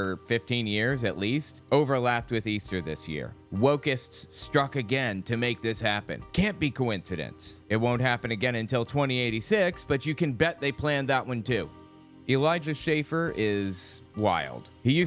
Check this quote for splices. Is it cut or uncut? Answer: cut